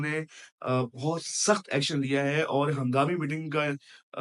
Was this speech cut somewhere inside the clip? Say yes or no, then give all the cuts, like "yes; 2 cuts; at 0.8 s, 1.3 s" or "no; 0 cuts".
no; 0 cuts